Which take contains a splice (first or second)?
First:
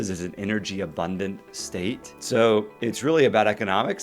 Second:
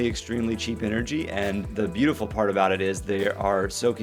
first